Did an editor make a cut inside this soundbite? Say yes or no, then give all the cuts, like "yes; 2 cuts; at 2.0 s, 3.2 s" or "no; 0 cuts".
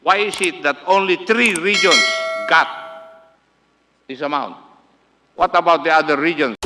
no; 0 cuts